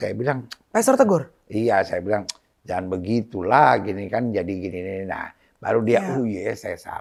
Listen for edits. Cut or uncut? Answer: uncut